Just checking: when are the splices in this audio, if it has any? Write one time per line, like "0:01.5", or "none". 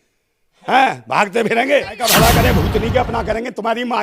0:02.1